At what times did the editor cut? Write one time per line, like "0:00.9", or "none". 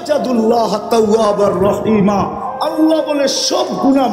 none